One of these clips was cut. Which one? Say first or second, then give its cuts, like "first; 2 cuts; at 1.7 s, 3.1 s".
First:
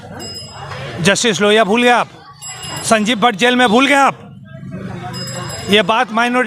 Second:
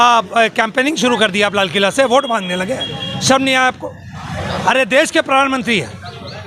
second; 1 cut; at 4.0 s